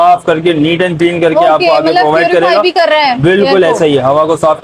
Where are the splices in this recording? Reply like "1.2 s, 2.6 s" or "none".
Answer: none